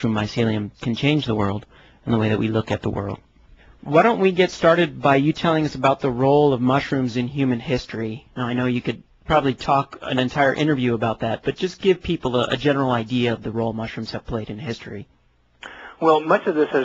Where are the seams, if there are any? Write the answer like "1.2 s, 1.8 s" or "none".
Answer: 9.6 s